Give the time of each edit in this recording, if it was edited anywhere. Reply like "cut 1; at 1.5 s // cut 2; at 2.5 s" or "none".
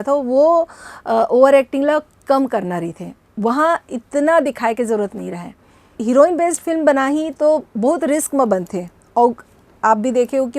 cut 1; at 5.9 s